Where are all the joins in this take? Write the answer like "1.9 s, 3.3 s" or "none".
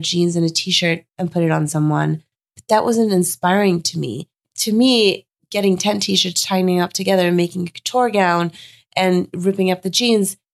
4.5 s, 5.5 s